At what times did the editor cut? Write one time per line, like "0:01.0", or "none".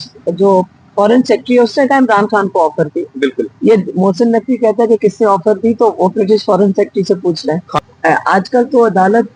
0:07.7